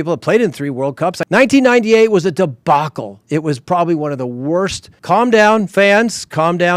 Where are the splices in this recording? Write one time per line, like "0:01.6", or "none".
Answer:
0:01.2
0:04.9